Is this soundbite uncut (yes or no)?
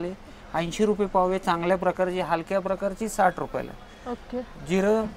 yes